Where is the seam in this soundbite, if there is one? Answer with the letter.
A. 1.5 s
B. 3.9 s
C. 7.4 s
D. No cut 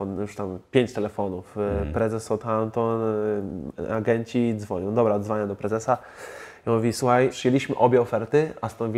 C